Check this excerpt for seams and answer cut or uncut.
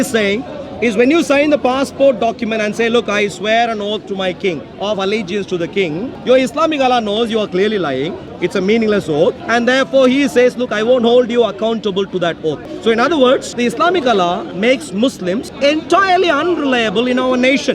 cut